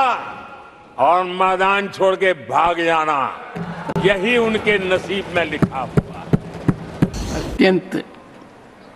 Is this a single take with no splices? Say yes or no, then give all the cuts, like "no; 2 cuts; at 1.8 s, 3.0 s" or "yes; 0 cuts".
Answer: no; 1 cut; at 7.2 s